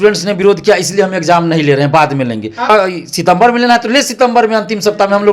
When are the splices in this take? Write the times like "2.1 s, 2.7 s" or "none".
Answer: 2.7 s